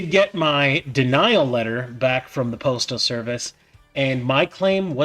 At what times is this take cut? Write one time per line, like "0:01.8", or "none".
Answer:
none